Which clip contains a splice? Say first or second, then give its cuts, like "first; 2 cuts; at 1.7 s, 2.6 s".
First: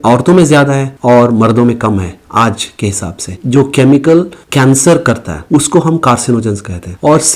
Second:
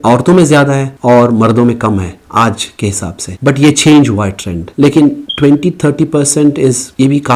first; 1 cut; at 3.3 s